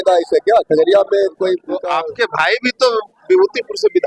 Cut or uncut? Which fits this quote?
cut